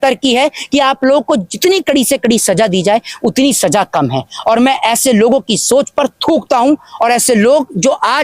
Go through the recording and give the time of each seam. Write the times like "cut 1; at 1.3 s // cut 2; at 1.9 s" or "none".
none

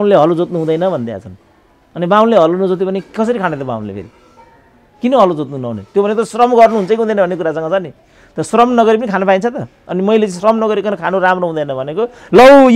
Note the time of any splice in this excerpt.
none

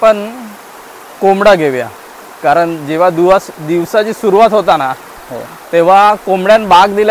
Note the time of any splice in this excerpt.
none

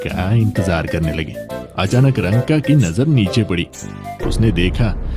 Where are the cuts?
cut 1; at 1.6 s

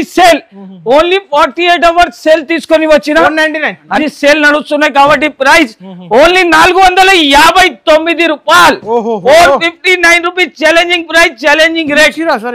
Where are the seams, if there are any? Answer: cut 1; at 3.9 s

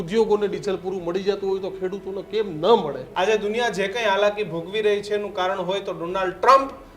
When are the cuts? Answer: cut 1; at 3.0 s

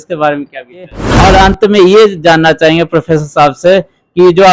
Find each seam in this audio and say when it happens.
cut 1; at 1.0 s

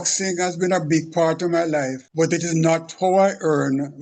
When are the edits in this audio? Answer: cut 1; at 2.0 s

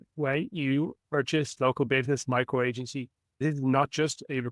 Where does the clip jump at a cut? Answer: cut 1; at 1.5 s // cut 2; at 3.4 s

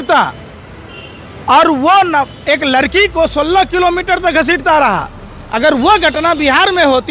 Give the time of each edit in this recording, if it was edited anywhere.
none

